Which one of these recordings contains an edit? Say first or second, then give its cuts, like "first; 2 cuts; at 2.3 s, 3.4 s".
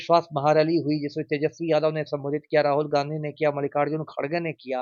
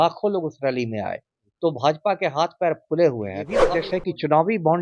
second; 1 cut; at 3.7 s